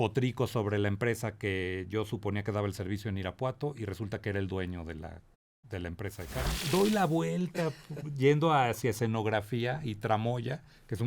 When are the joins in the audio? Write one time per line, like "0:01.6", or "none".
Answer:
0:06.6